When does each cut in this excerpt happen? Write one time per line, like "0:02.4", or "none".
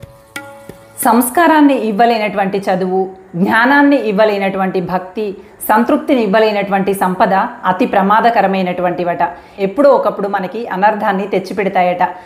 0:01.0